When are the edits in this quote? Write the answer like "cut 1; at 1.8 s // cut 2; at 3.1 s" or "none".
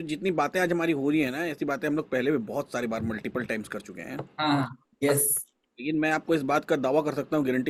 none